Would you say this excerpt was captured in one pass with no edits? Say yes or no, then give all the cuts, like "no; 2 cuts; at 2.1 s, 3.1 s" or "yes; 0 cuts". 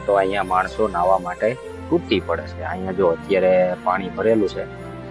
yes; 0 cuts